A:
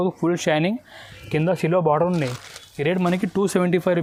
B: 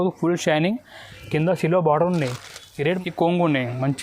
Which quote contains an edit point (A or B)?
B